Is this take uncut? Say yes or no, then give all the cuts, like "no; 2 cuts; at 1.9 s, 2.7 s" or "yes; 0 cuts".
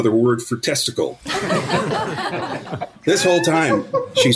no; 1 cut; at 2.7 s